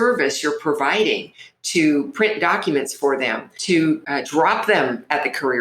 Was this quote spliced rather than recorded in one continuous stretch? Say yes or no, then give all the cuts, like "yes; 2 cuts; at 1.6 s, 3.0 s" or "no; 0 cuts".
yes; 1 cut; at 3.9 s